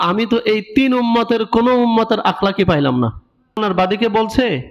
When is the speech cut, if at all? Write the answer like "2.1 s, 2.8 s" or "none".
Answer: 3.6 s

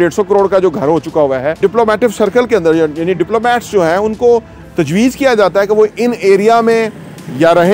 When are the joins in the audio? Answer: 1.5 s

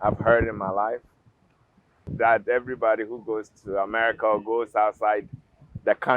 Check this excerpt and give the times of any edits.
2.1 s

